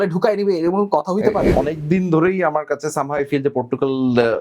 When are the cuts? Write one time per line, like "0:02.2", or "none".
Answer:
0:01.5